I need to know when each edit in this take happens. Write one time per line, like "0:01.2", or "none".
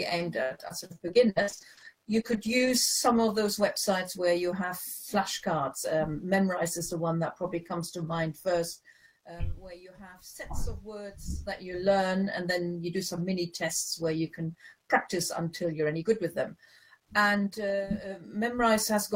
0:02.7